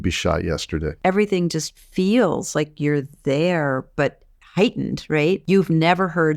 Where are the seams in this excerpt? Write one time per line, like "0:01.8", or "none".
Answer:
0:00.9
0:05.4